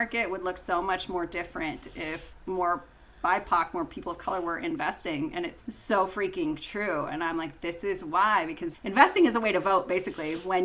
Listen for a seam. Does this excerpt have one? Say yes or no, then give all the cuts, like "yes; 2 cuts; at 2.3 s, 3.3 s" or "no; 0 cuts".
no; 0 cuts